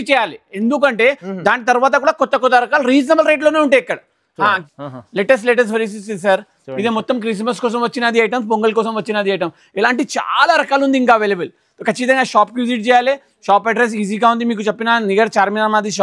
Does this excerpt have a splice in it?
yes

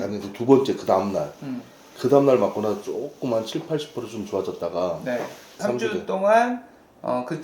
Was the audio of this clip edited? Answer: yes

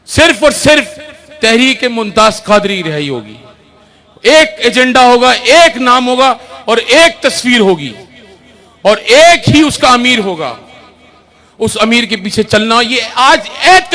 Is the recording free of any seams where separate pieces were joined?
yes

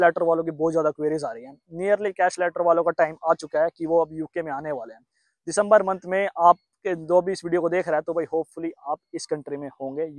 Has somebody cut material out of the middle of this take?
no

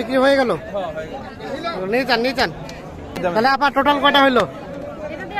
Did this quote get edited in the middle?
yes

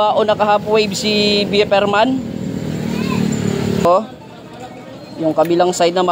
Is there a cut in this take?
yes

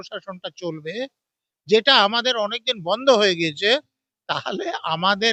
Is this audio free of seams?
yes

